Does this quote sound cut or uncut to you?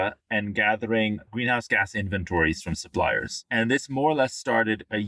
cut